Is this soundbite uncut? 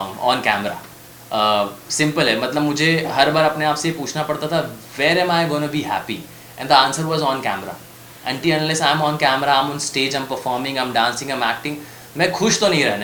yes; 0 cuts

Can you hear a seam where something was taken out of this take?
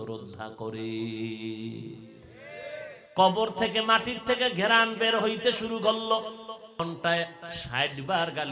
yes; 2 cuts; at 3.0 s, 6.8 s

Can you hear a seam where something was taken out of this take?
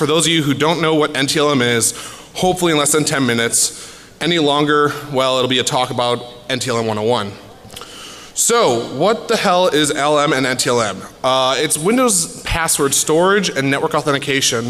no; 0 cuts

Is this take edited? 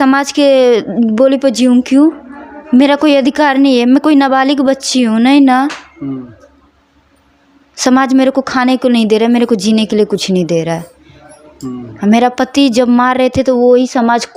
no; 0 cuts

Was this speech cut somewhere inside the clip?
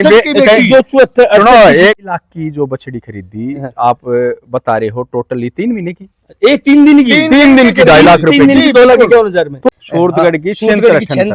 yes; 2 cuts; at 2.0 s, 9.7 s

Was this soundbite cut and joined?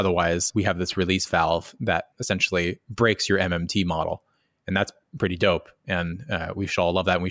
yes; 1 cut; at 2.1 s

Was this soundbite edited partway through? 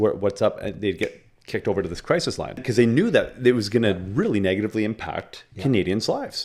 yes; 1 cut; at 2.6 s

